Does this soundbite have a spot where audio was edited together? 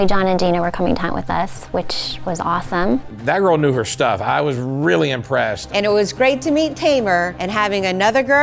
yes; 3 cuts; at 3.1 s, 5.6 s, 7.4 s

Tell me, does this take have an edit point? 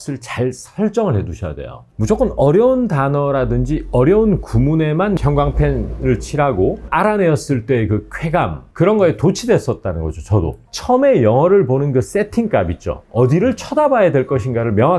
yes; 4 cuts; at 1.9 s, 5.2 s, 6.8 s, 10.6 s

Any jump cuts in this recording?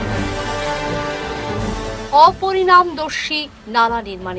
yes; 1 cut; at 1.5 s

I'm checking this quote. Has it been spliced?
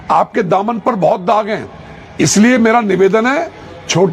no; 0 cuts

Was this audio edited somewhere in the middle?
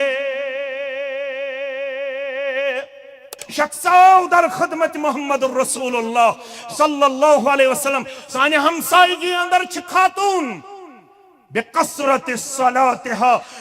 yes; 1 cut; at 3.4 s

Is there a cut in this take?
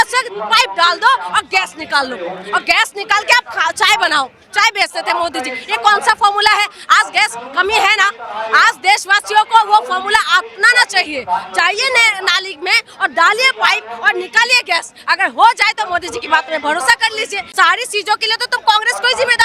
yes; 1 cut; at 17.4 s

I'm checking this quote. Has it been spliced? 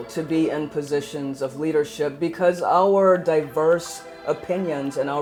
no; 0 cuts

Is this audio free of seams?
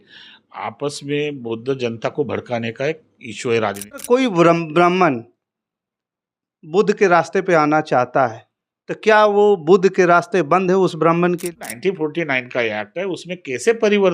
no; 2 cuts; at 4.0 s, 11.5 s

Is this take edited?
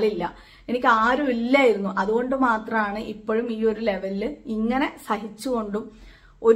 no; 0 cuts

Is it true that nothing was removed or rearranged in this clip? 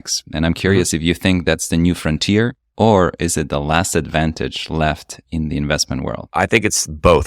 no; 2 cuts; at 2.6 s, 6.2 s

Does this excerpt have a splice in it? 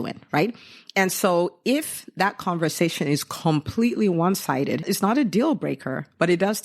yes; 1 cut; at 4.8 s

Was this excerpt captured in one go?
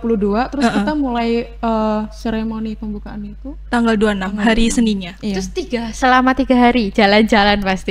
yes; 0 cuts

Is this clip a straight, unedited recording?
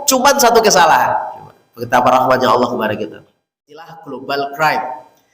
no; 1 cut; at 4.0 s

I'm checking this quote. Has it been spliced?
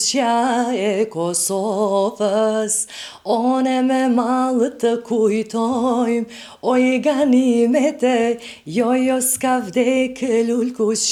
no; 0 cuts

